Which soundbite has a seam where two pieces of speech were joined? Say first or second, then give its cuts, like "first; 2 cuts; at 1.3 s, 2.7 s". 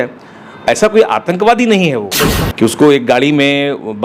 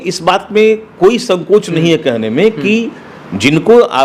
first; 1 cut; at 2.2 s